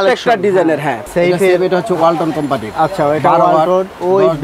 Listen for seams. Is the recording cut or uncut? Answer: cut